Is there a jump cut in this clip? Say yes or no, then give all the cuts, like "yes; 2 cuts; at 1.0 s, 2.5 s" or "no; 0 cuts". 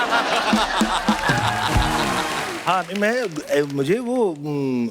yes; 1 cut; at 2.5 s